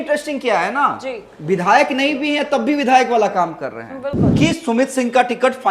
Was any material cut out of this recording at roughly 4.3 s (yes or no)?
yes